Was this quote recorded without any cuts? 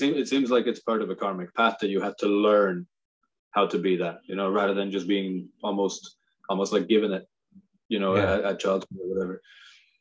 yes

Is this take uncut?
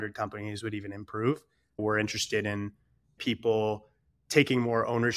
no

